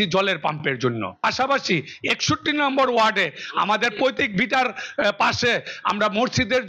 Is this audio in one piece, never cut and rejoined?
no; 1 cut; at 1.1 s

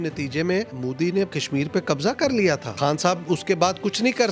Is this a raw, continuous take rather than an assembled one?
no; 2 cuts; at 1.1 s, 2.8 s

